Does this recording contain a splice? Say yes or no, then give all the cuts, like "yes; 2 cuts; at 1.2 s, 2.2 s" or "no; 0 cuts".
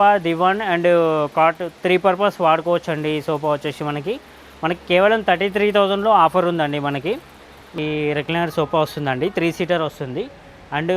yes; 1 cut; at 7.8 s